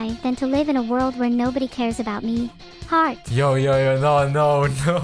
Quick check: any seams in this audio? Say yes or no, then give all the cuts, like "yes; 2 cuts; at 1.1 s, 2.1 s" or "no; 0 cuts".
yes; 1 cut; at 3.2 s